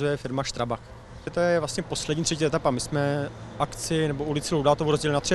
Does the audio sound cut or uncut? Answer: cut